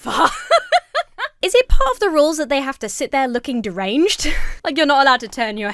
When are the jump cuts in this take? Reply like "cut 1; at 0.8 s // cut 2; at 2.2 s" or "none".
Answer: cut 1; at 1.2 s

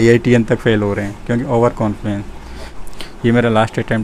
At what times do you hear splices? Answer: cut 1; at 2.8 s

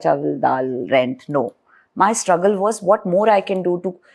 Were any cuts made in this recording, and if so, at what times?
none

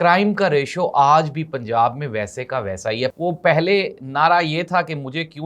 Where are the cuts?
cut 1; at 3.1 s

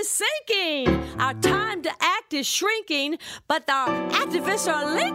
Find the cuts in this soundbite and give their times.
none

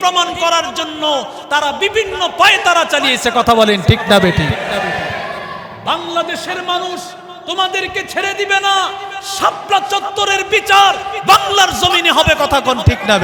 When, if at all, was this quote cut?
none

